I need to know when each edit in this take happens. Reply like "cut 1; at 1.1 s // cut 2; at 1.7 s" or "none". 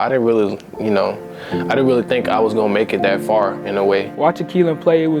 cut 1; at 4.1 s